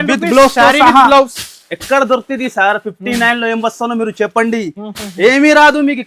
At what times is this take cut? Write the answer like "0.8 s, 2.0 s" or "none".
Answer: none